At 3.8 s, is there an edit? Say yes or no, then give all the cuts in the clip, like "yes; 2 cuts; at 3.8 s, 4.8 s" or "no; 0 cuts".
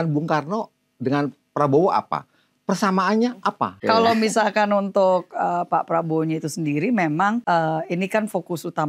yes; 2 cuts; at 3.8 s, 7.4 s